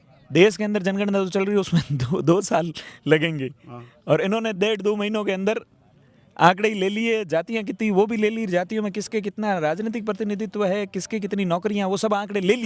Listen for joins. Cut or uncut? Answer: uncut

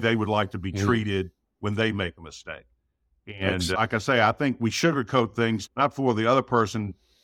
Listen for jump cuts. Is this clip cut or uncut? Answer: cut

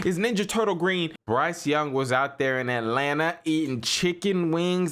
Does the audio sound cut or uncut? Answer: cut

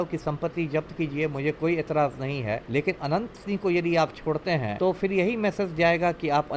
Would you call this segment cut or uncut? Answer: cut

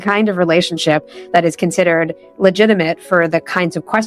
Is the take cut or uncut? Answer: uncut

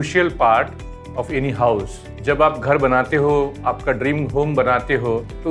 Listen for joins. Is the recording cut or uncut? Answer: uncut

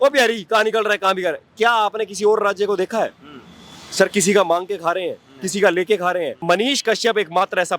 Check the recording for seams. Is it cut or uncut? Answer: cut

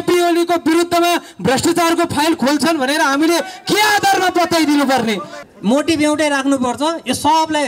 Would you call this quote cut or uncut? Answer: cut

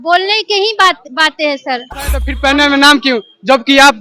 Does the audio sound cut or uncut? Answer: cut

